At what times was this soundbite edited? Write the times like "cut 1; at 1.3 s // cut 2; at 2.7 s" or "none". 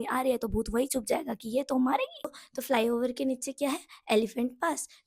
cut 1; at 2.4 s